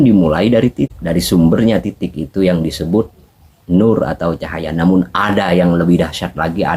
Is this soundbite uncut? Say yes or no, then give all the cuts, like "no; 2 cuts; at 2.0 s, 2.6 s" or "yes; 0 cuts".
no; 1 cut; at 1.0 s